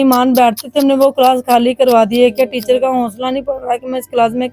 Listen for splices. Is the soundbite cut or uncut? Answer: uncut